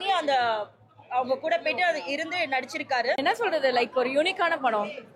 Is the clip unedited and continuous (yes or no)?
no